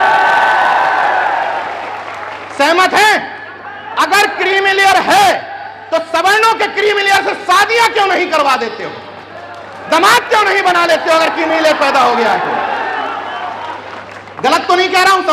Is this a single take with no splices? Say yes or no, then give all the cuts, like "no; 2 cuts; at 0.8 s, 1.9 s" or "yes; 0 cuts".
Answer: yes; 0 cuts